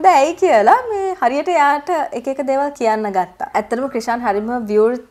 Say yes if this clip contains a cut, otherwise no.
yes